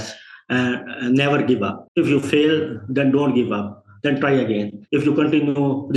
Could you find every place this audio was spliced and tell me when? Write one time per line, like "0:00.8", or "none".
0:04.8